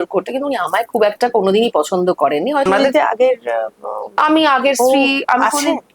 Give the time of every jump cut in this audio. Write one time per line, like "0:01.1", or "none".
0:02.7